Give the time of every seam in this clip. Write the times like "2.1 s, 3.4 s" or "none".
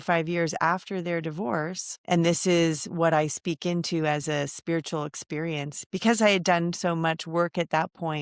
1.9 s